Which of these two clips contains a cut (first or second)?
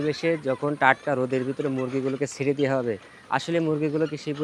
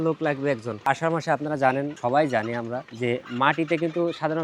second